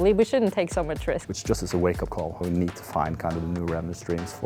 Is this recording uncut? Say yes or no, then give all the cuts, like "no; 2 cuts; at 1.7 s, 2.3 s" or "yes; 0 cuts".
no; 2 cuts; at 1.2 s, 2.4 s